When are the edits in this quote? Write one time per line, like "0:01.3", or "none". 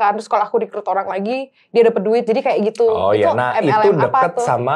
none